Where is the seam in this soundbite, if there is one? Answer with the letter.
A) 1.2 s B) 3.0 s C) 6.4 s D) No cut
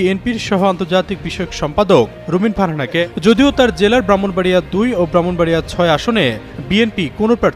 B